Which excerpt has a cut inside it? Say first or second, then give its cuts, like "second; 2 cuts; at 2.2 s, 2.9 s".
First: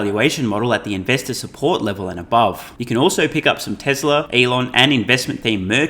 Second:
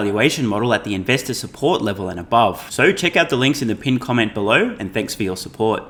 first; 2 cuts; at 2.7 s, 4.3 s